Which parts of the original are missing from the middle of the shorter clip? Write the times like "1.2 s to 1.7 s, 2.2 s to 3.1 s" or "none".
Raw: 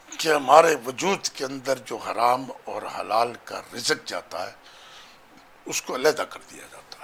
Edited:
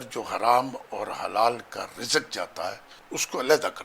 4.7 s to 5.5 s